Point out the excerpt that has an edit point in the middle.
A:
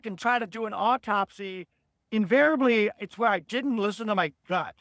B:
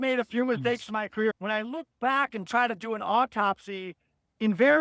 B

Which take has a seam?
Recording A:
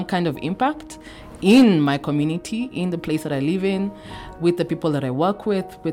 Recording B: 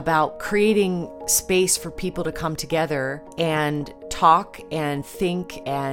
B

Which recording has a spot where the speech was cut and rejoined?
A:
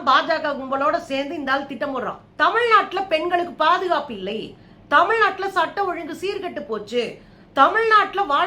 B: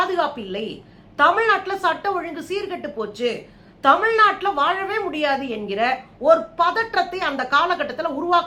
A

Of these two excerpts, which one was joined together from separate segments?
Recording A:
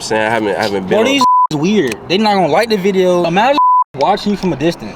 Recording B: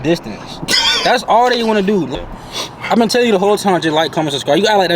B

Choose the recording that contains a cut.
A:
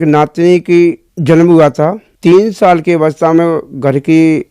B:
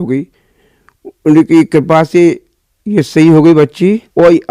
A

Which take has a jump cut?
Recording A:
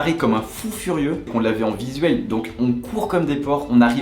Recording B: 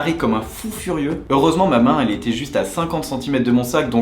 A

